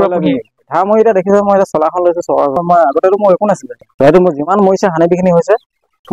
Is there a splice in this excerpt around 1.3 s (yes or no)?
no